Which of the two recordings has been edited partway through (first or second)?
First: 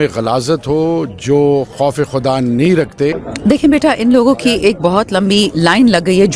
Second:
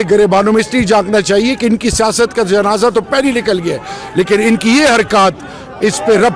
first